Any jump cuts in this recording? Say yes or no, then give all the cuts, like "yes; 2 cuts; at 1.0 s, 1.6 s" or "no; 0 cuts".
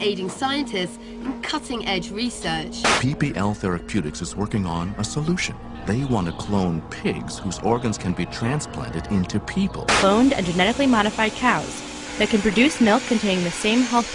yes; 1 cut; at 12.0 s